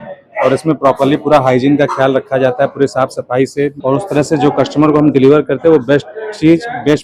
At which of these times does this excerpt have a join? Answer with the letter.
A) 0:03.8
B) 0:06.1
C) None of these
A